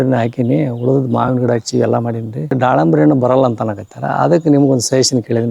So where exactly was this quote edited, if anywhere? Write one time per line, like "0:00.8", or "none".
0:02.6

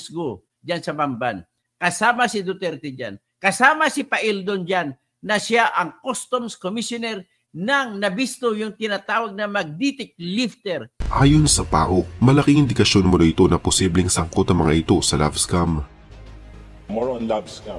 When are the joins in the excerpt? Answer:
0:10.9

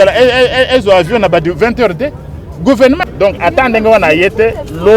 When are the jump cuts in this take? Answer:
0:03.0

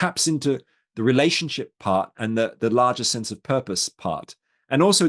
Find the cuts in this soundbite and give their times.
none

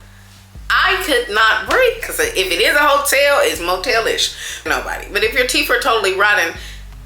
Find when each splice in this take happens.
0:02.1
0:04.7

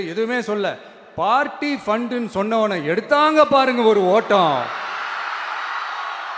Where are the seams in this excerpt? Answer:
none

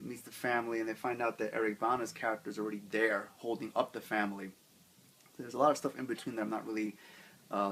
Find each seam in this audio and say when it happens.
none

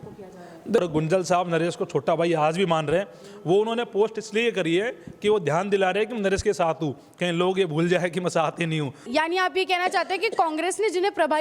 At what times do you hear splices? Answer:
0:00.8
0:09.1

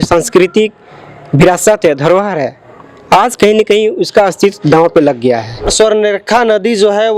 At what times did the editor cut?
0:05.7

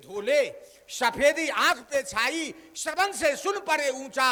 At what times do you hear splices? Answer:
none

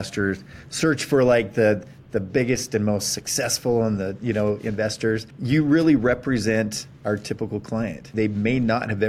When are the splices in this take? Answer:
0:05.3
0:08.1

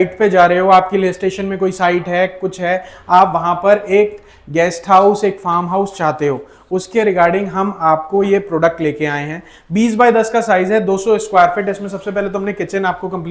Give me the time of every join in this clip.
none

